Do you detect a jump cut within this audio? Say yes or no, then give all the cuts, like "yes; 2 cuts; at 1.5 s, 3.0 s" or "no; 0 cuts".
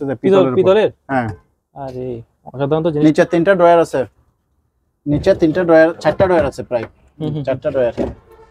no; 0 cuts